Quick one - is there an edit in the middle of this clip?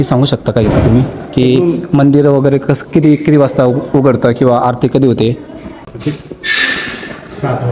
yes; 1 cut; at 5.9 s

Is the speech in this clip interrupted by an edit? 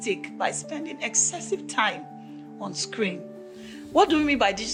no; 0 cuts

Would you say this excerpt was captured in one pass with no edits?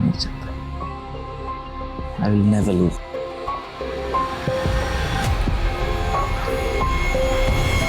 yes; 0 cuts

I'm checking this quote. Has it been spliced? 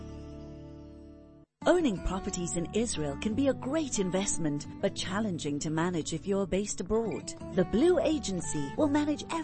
yes; 1 cut; at 1.4 s

